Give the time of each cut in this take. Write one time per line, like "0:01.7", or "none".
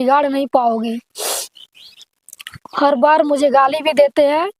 none